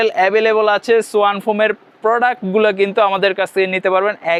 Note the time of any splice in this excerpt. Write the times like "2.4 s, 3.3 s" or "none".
none